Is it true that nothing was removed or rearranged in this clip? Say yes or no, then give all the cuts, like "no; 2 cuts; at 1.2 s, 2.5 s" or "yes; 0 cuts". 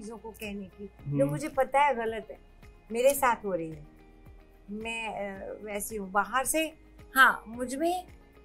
yes; 0 cuts